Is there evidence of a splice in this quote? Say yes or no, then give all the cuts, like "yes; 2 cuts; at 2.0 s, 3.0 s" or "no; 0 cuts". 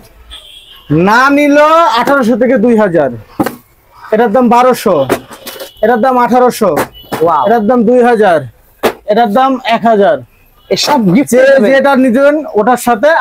no; 0 cuts